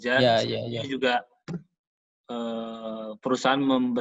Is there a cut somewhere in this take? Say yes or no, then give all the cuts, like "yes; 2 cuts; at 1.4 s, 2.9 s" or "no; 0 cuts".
no; 0 cuts